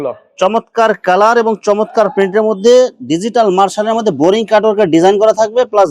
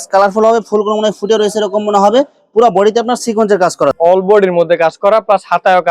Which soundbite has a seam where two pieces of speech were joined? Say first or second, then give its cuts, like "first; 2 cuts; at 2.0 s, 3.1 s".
second; 1 cut; at 4.0 s